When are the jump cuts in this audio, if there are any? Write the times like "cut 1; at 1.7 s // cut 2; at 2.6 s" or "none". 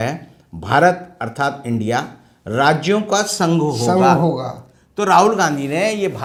none